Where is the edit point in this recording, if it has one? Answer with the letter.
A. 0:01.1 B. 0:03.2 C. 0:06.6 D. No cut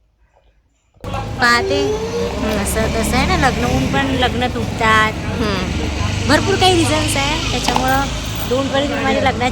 A